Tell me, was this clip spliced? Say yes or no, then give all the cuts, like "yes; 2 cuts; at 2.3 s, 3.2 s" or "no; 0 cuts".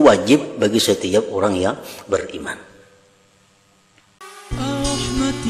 yes; 1 cut; at 4.1 s